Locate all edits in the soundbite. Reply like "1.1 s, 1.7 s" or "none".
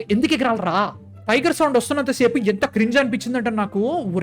1.1 s